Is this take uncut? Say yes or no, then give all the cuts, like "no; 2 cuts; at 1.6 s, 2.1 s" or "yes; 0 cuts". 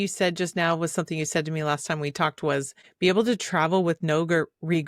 no; 1 cut; at 2.8 s